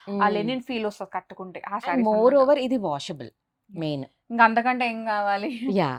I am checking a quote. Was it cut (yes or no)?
no